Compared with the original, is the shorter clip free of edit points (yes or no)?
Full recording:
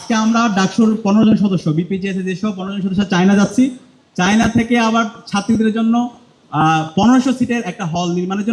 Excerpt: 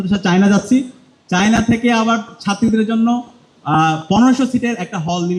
yes